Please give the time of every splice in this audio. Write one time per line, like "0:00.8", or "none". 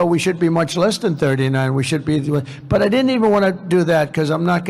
none